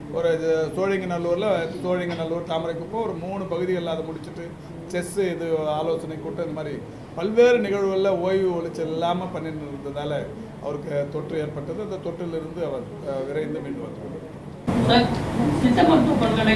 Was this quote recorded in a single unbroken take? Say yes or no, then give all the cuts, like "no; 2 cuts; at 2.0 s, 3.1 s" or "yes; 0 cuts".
yes; 0 cuts